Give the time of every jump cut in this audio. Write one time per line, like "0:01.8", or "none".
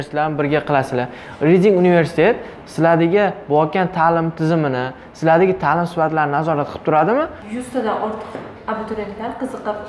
0:07.4